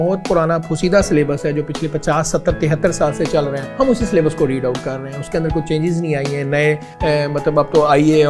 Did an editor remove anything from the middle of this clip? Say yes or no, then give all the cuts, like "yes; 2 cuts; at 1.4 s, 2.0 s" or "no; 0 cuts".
yes; 2 cuts; at 3.6 s, 6.9 s